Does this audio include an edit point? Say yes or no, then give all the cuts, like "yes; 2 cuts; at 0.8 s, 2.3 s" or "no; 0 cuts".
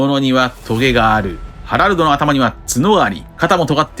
yes; 1 cut; at 1.4 s